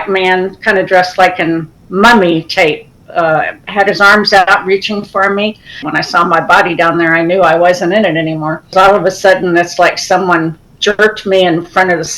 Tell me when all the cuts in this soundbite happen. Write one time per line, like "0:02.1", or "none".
0:05.8
0:08.7